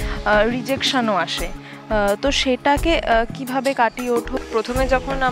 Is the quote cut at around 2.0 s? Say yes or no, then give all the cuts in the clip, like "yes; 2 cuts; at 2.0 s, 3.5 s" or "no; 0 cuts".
no; 1 cut; at 4.4 s